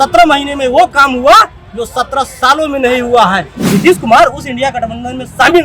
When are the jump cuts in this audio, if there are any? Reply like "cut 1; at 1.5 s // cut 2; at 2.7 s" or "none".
cut 1; at 3.5 s